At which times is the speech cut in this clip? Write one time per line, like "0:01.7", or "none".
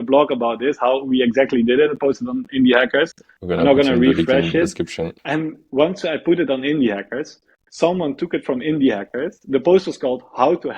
0:05.2